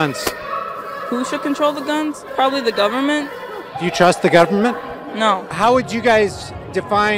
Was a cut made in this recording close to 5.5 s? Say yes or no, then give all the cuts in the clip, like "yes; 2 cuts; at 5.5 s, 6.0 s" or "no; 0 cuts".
yes; 2 cuts; at 2.2 s, 5.5 s